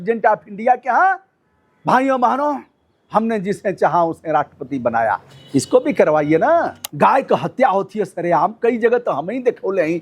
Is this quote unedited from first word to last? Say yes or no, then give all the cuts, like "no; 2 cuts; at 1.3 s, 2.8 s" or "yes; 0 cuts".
no; 1 cut; at 6.8 s